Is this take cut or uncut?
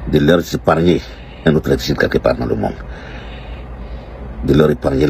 uncut